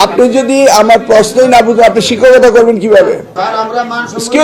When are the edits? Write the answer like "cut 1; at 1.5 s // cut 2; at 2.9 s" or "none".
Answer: cut 1; at 3.3 s